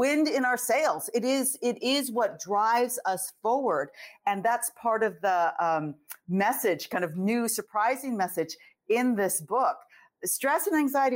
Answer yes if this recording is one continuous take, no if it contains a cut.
yes